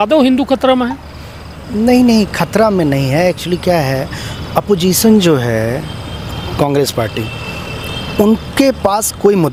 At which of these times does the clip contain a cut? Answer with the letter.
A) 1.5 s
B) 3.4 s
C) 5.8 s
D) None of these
D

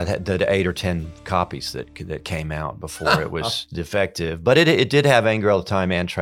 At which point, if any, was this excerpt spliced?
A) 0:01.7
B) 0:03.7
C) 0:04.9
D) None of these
B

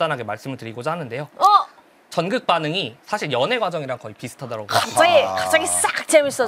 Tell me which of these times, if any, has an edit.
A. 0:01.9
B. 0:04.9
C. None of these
C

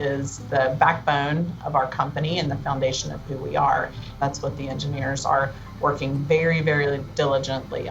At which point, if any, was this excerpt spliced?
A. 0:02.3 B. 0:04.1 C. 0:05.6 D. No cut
B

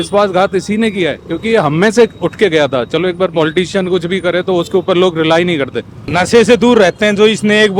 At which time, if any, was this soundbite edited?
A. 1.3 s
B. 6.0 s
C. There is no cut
B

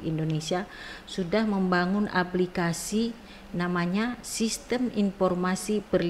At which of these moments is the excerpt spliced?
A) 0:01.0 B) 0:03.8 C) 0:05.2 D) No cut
D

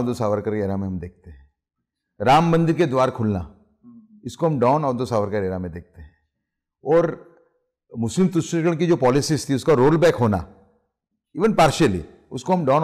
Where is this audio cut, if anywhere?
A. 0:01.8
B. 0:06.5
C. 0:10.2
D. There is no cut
D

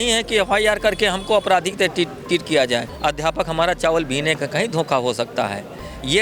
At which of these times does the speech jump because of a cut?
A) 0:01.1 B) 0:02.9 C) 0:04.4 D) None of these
B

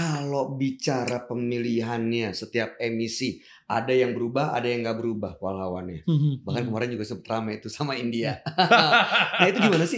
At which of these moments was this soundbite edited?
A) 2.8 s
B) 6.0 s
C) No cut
C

